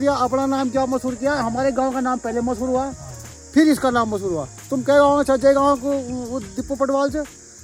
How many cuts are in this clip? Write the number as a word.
zero